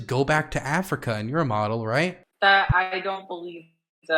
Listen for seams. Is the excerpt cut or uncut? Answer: cut